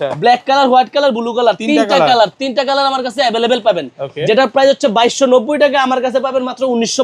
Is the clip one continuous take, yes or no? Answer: yes